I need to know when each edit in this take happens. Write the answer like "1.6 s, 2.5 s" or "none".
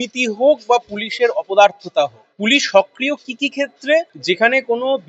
2.2 s, 4.1 s